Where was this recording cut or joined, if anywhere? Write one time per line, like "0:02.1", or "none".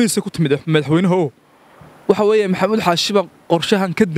none